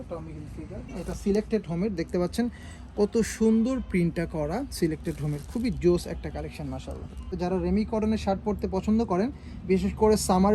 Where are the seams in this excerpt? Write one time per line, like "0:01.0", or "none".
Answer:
0:01.0
0:07.3